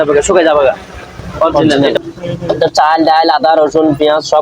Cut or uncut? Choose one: cut